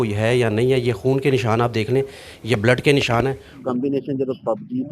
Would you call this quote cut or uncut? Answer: cut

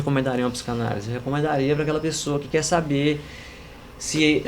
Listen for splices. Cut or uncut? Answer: uncut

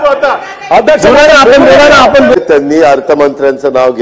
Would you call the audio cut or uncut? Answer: cut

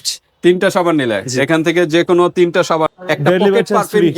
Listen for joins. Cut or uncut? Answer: cut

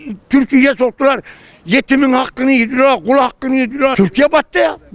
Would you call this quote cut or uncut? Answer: cut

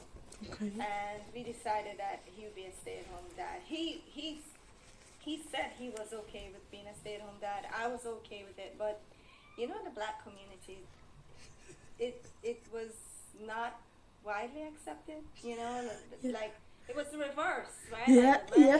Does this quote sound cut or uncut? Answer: uncut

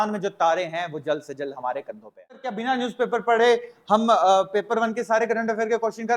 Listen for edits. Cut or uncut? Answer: cut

